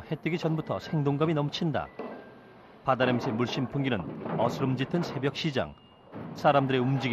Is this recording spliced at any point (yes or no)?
yes